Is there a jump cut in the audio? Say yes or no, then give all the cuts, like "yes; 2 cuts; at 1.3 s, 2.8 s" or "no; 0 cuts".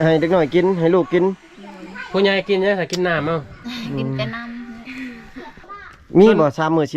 yes; 1 cut; at 5.7 s